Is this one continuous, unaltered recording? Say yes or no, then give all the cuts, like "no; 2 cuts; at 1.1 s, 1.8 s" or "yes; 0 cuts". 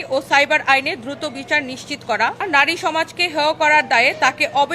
no; 1 cut; at 2.5 s